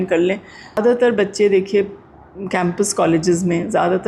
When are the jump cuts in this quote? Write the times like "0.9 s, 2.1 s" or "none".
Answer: 1.1 s